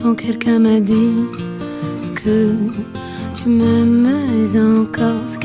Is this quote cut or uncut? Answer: uncut